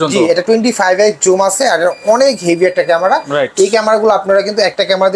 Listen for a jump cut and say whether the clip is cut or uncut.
uncut